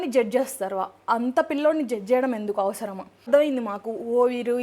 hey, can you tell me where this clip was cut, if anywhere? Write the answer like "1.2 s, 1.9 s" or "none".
3.3 s